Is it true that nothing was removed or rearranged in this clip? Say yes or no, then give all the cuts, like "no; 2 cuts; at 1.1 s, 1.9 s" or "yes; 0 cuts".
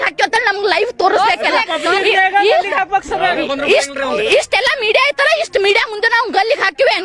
yes; 0 cuts